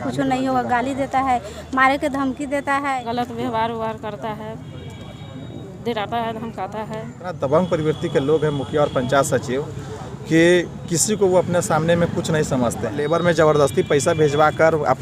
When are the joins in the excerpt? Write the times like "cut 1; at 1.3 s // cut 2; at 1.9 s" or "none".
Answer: cut 1; at 3.0 s // cut 2; at 7.4 s // cut 3; at 13.1 s

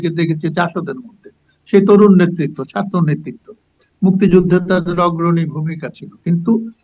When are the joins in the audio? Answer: none

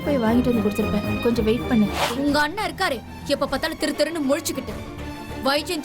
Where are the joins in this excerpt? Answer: cut 1; at 2.0 s

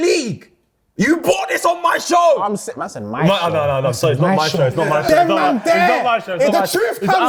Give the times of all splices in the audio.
none

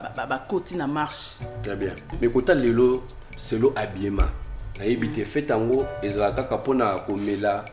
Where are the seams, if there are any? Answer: cut 1; at 2.0 s

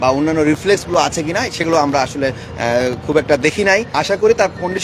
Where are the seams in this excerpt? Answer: cut 1; at 3.9 s

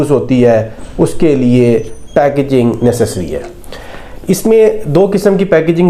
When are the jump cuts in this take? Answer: none

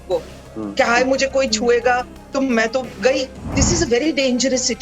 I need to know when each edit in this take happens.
cut 1; at 2.2 s // cut 2; at 3.4 s

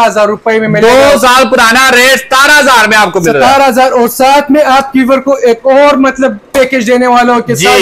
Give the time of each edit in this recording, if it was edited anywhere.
none

